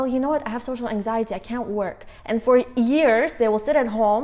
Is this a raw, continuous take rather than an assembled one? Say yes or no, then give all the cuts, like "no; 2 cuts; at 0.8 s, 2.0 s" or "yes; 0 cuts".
yes; 0 cuts